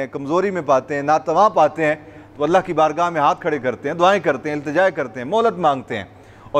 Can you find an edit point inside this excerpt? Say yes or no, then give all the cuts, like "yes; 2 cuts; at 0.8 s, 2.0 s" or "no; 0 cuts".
no; 0 cuts